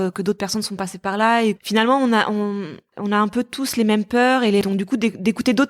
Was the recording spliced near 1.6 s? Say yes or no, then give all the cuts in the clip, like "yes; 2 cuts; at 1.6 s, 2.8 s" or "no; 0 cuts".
yes; 3 cuts; at 1.6 s, 2.9 s, 4.6 s